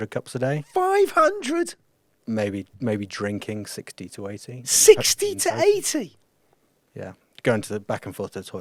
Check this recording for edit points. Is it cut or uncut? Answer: uncut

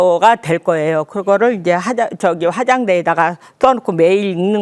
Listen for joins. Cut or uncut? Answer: uncut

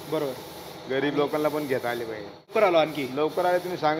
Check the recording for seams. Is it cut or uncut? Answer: cut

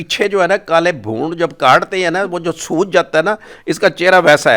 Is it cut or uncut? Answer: uncut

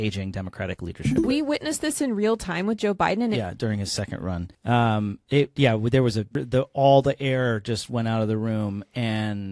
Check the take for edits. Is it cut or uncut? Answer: cut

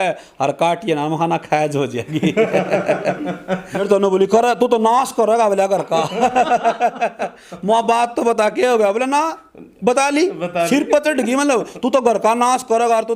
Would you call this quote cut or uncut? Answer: cut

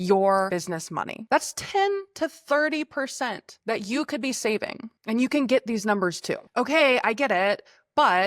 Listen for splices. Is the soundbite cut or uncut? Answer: cut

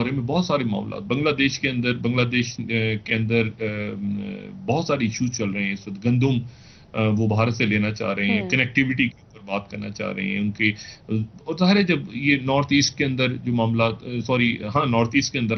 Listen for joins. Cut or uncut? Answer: uncut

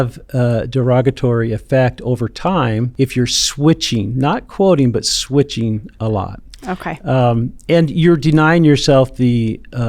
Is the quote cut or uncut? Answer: cut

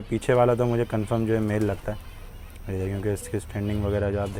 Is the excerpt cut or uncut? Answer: uncut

